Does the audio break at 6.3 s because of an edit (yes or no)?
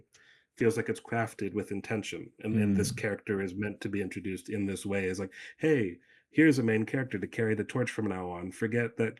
no